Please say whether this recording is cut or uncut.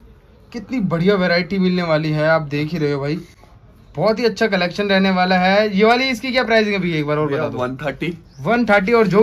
uncut